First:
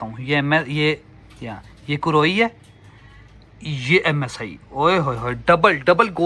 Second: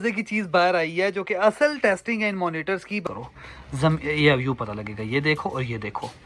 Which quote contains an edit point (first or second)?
second